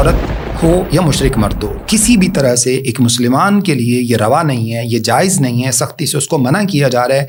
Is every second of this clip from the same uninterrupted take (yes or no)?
yes